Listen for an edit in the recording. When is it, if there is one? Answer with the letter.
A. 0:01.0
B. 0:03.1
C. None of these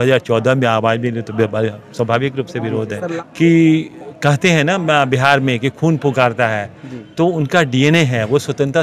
B